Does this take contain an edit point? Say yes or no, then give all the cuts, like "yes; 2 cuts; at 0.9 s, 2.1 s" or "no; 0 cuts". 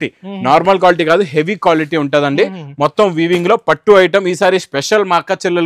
no; 0 cuts